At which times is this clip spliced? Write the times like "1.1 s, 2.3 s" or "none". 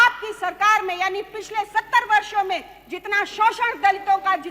none